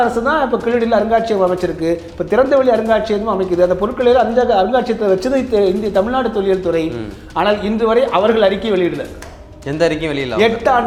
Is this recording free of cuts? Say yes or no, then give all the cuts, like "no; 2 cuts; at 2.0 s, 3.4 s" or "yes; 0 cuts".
yes; 0 cuts